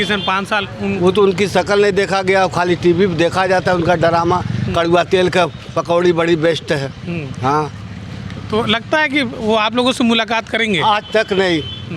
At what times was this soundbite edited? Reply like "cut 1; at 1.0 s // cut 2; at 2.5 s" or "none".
none